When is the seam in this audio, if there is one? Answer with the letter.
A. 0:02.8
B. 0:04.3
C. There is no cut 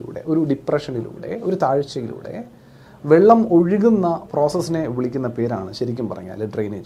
C